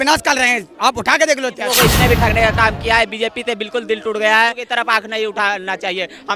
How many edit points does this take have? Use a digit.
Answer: 2